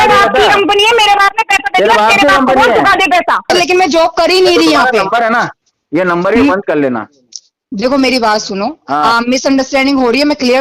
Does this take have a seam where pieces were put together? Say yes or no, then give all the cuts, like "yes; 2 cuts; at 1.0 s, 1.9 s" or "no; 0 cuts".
yes; 1 cut; at 3.5 s